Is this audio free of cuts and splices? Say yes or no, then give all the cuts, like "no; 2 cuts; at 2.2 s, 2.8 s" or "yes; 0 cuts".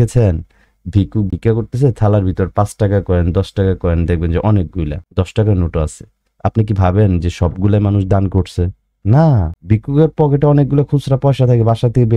no; 1 cut; at 1.3 s